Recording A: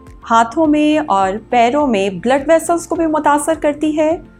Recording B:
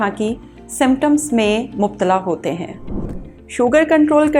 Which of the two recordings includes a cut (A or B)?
B